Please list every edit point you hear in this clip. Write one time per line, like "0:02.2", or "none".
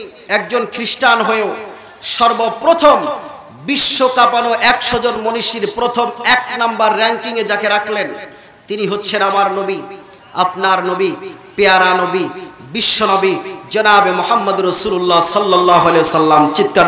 none